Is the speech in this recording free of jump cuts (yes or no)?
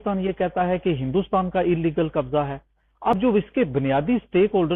no